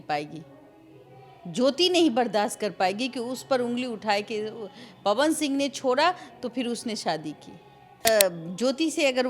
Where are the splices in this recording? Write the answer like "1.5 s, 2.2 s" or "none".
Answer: 8.0 s